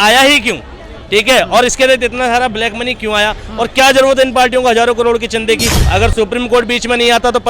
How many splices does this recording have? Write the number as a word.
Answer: one